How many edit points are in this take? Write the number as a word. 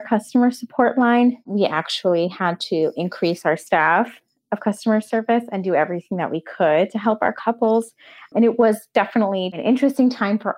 one